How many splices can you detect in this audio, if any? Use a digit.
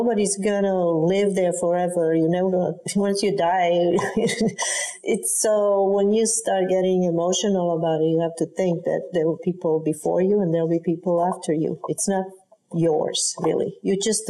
1